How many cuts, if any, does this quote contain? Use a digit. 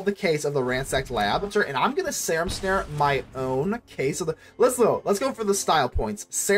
1